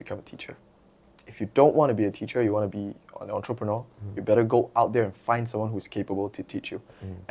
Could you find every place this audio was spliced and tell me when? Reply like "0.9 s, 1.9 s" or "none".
none